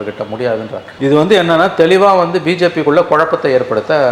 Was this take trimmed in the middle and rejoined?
no; 0 cuts

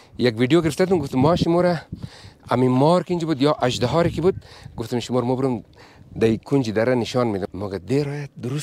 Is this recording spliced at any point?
yes; 1 cut; at 7.4 s

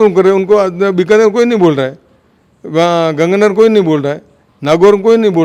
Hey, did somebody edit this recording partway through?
no; 0 cuts

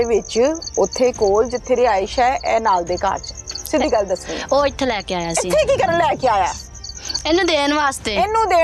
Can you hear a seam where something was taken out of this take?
no; 0 cuts

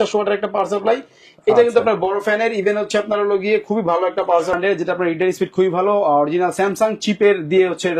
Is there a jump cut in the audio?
yes; 1 cut; at 4.6 s

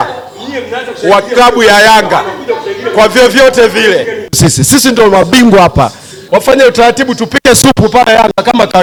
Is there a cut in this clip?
no; 0 cuts

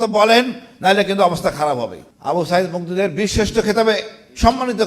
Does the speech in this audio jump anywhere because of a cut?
yes; 1 cut; at 2.0 s

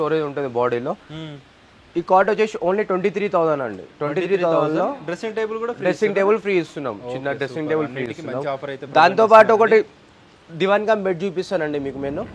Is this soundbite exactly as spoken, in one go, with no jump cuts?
yes; 0 cuts

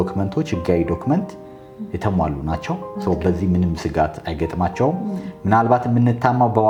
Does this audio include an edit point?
no; 0 cuts

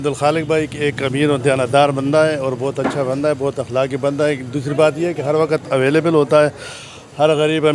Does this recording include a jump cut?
no; 0 cuts

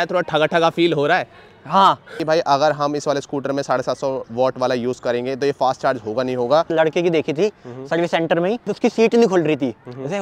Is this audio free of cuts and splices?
no; 3 cuts; at 2.2 s, 6.7 s, 8.7 s

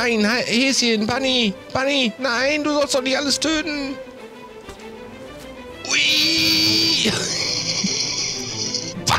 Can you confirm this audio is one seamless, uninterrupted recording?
yes; 0 cuts

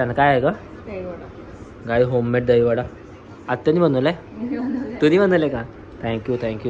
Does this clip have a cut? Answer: no; 0 cuts

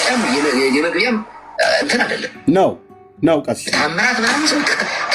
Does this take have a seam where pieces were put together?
yes; 2 cuts; at 1.4 s, 2.5 s

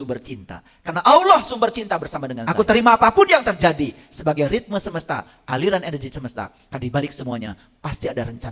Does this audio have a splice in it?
yes; 1 cut; at 2.5 s

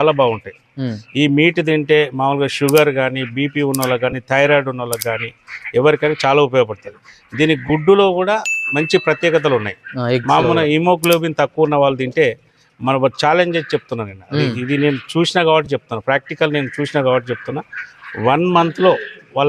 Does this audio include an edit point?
no; 0 cuts

